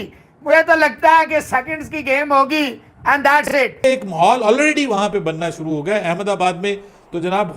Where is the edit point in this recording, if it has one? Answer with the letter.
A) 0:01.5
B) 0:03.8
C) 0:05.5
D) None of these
B